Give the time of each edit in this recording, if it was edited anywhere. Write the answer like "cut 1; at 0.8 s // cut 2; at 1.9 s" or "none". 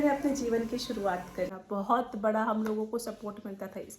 cut 1; at 1.6 s